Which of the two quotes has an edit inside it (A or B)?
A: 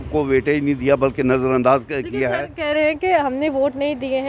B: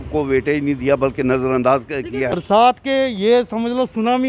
B